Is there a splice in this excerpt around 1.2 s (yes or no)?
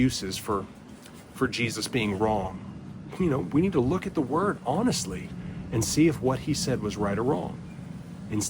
no